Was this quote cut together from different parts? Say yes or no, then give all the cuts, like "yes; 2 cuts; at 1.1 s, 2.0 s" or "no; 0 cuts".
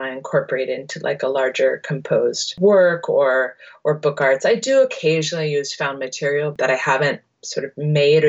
yes; 2 cuts; at 2.5 s, 6.5 s